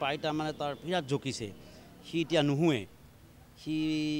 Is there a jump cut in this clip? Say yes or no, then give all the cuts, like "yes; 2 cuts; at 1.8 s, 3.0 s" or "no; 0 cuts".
no; 0 cuts